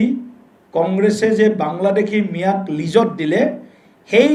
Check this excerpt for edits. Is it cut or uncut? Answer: uncut